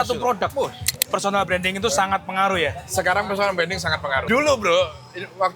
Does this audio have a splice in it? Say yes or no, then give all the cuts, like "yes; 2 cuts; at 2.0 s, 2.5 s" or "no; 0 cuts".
yes; 2 cuts; at 0.9 s, 4.2 s